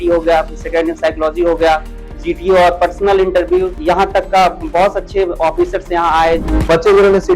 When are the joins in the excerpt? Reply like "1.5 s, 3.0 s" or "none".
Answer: 3.7 s, 6.5 s